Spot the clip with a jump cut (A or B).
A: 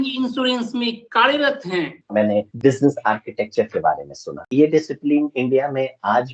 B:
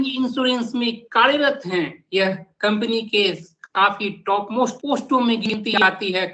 A